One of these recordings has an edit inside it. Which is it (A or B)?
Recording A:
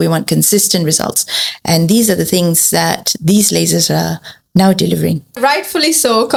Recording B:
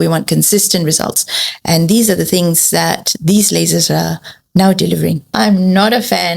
B